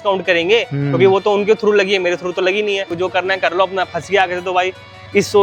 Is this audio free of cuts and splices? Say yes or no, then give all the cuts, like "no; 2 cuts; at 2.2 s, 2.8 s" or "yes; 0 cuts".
no; 1 cut; at 2.9 s